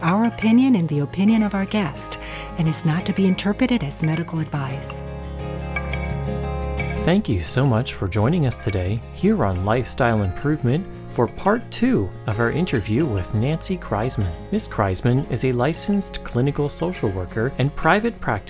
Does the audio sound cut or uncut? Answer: cut